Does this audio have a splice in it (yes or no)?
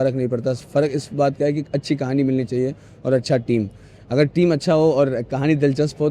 no